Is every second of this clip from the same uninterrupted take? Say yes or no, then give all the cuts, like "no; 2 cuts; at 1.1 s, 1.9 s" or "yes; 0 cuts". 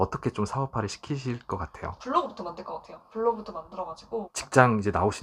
no; 2 cuts; at 2.0 s, 4.2 s